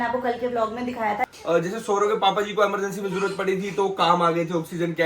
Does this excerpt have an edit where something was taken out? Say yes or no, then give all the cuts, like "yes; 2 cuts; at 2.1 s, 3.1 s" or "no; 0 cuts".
yes; 1 cut; at 1.3 s